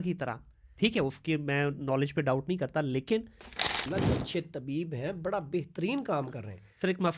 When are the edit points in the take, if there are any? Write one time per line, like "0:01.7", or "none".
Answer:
0:03.8